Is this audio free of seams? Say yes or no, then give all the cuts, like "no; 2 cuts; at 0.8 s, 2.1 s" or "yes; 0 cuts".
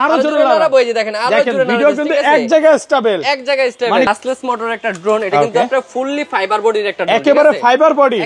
no; 1 cut; at 4.1 s